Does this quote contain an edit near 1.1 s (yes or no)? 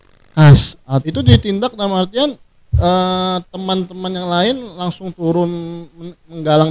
yes